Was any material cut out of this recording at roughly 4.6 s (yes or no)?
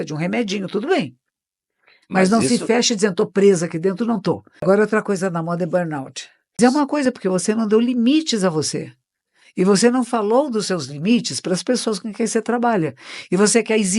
yes